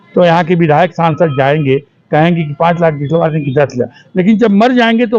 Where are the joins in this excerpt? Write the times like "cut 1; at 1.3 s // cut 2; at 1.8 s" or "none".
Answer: none